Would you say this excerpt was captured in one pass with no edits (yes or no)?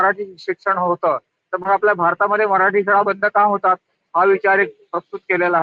yes